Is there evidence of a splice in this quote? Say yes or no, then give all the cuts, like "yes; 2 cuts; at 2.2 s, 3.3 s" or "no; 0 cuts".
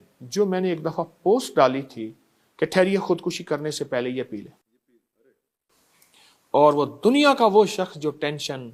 no; 0 cuts